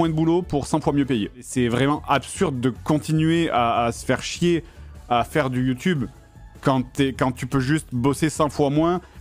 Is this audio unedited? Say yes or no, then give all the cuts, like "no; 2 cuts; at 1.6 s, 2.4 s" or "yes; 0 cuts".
no; 1 cut; at 1.5 s